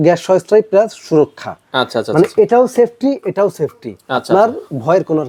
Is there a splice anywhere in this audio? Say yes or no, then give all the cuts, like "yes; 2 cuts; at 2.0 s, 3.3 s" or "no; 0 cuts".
no; 0 cuts